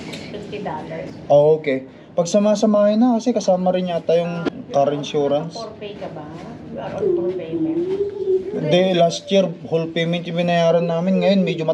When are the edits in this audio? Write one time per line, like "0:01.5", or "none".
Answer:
0:01.1
0:04.5